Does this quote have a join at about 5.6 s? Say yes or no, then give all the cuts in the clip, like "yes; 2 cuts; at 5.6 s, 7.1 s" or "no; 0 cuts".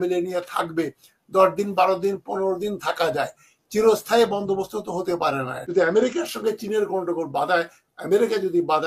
yes; 1 cut; at 5.6 s